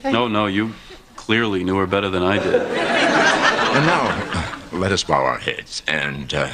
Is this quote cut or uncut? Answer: uncut